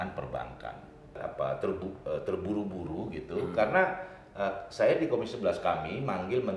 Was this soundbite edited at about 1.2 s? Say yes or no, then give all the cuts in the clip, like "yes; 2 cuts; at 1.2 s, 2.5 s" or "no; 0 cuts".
yes; 1 cut; at 1.2 s